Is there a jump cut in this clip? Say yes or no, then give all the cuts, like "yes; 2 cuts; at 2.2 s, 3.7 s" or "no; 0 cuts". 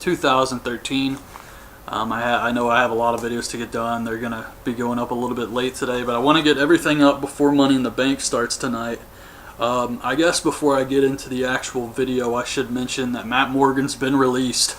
yes; 1 cut; at 10.2 s